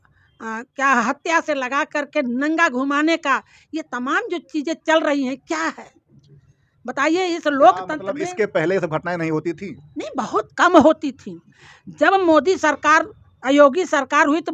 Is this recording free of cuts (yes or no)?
yes